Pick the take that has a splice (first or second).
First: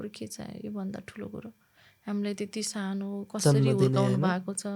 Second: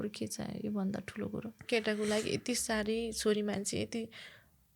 second